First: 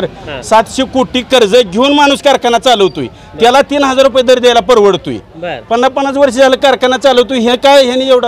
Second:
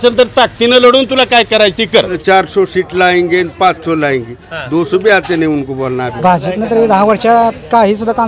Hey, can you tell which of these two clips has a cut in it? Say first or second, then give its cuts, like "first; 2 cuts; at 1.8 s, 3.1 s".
second; 2 cuts; at 2.2 s, 6.1 s